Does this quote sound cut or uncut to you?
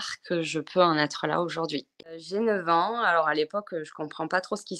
cut